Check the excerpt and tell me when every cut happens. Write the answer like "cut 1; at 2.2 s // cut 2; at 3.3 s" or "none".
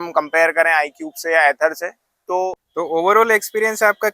cut 1; at 2.6 s